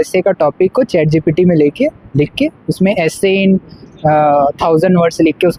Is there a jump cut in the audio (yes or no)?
no